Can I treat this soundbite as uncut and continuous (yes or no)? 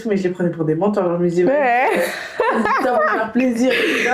yes